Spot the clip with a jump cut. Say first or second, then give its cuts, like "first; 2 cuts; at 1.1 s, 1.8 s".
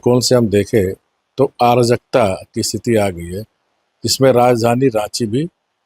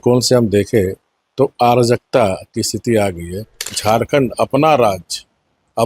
second; 1 cut; at 3.6 s